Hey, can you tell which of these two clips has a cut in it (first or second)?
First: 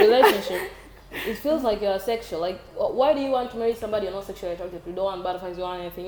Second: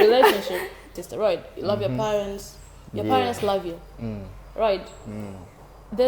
second